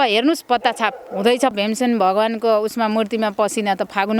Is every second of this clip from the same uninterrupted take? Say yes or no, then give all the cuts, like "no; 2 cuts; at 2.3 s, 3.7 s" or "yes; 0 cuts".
no; 1 cut; at 1.5 s